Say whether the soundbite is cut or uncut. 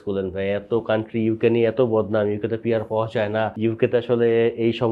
cut